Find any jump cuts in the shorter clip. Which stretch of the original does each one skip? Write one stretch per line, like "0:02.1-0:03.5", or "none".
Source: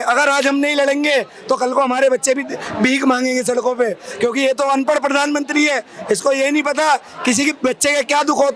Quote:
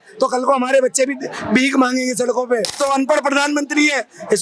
0:04.1-0:04.6